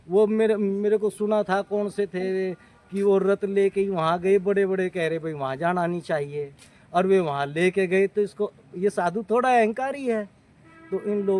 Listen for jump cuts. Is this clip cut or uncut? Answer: uncut